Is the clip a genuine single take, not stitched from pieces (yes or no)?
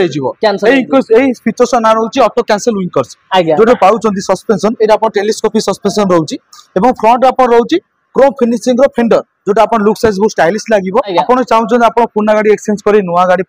no